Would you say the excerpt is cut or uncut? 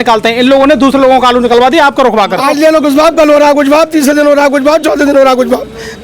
cut